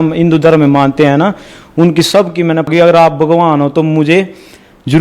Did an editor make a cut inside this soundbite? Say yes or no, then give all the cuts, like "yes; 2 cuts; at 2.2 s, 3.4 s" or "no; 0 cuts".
yes; 1 cut; at 2.7 s